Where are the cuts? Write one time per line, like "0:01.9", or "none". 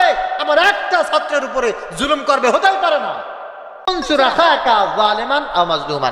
0:03.7